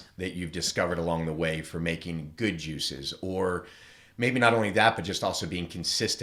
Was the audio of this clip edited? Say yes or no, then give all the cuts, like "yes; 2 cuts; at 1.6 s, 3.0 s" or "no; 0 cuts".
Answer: no; 0 cuts